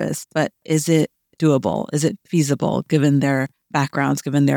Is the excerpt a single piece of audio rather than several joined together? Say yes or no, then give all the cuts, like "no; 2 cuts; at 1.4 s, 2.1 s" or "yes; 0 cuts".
no; 1 cut; at 3.6 s